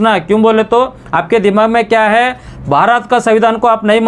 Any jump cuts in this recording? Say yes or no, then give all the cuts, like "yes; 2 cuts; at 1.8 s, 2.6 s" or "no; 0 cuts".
no; 0 cuts